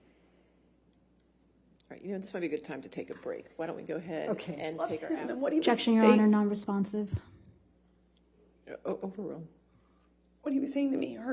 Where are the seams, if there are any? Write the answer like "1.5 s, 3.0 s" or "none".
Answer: 4.9 s